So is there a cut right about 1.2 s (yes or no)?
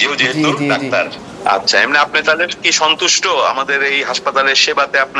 yes